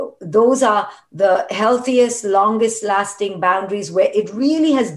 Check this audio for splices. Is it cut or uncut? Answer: uncut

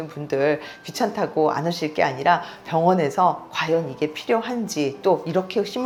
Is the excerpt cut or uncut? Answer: uncut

